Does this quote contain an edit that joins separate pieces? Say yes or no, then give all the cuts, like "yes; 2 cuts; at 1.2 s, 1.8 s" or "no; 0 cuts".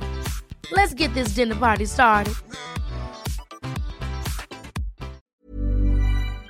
yes; 1 cut; at 5.2 s